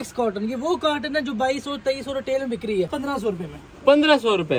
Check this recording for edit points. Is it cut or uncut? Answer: cut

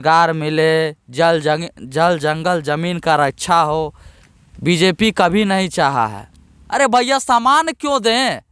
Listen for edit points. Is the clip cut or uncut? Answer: cut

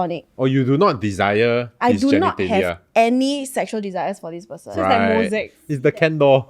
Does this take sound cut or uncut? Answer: uncut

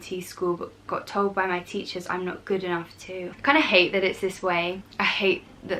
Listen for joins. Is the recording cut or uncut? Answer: cut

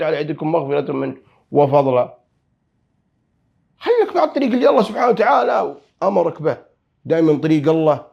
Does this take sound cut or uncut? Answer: uncut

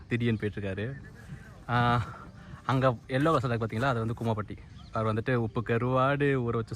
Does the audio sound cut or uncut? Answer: uncut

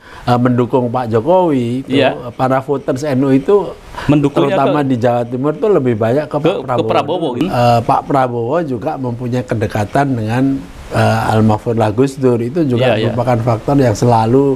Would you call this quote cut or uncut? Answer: cut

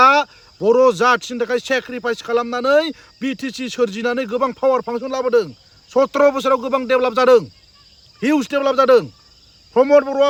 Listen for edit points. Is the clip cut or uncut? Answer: uncut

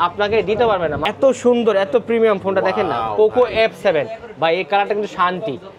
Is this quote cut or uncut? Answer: cut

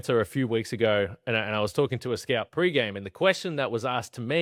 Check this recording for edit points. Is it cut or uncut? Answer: uncut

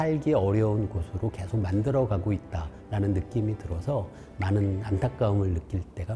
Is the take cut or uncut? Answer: uncut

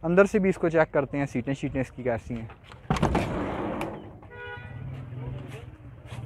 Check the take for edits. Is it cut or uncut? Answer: uncut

